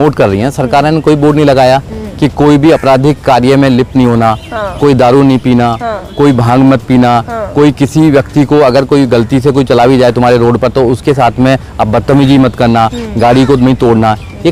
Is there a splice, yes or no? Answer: no